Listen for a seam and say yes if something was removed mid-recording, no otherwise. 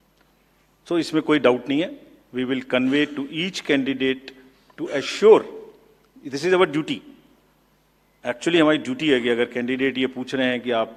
no